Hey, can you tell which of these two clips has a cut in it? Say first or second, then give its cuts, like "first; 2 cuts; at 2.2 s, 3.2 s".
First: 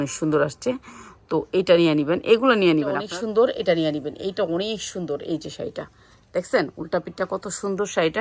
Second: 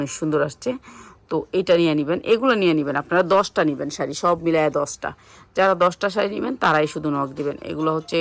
first; 1 cut; at 3.0 s